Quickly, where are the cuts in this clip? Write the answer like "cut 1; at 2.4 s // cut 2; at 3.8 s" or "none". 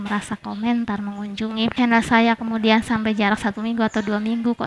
cut 1; at 1.8 s